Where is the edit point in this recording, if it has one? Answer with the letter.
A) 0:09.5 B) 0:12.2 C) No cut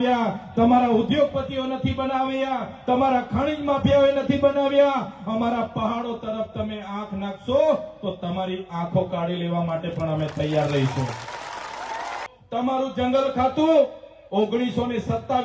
B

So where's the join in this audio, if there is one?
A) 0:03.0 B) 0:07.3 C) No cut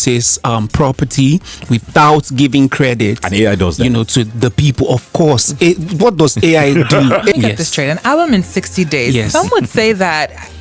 B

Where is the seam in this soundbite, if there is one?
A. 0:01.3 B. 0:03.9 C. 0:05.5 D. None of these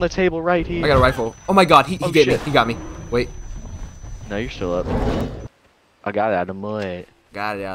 C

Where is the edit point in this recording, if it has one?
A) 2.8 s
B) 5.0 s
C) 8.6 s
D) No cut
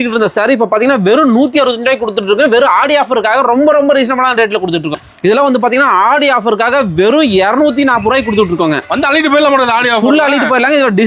B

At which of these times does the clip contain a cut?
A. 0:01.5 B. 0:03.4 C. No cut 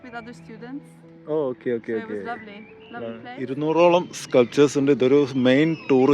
B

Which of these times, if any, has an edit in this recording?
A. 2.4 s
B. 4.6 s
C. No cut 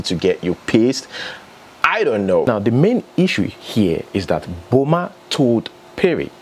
A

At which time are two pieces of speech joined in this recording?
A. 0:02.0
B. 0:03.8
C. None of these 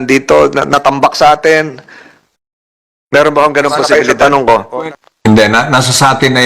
B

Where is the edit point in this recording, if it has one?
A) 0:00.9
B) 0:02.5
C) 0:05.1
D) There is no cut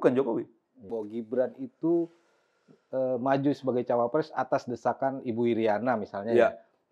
A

